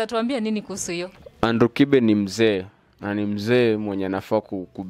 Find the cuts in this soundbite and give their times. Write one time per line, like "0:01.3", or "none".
0:01.2